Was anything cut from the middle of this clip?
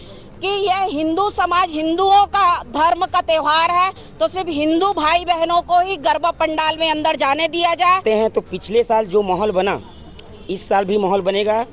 yes; 1 cut; at 8.0 s

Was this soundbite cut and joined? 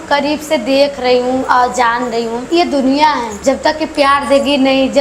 yes; 2 cuts; at 2.5 s, 3.3 s

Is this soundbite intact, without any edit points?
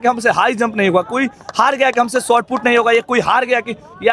yes; 0 cuts

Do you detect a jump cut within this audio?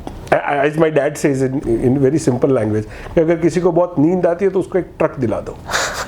yes; 1 cut; at 1.6 s

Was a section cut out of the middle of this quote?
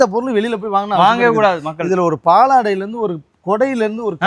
no; 0 cuts

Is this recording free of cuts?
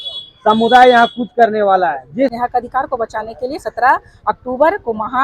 no; 1 cut; at 2.3 s

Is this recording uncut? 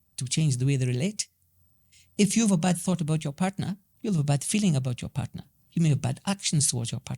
no; 1 cut; at 3.9 s

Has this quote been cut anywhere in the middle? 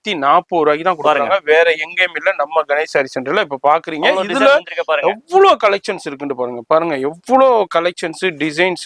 no; 0 cuts

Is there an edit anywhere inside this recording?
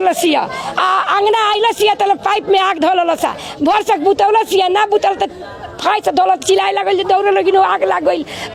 no; 0 cuts

